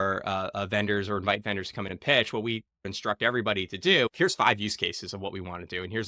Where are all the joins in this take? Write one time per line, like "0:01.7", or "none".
0:02.9
0:04.1